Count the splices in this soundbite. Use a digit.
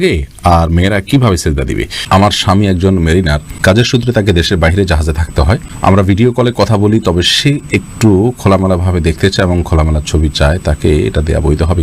3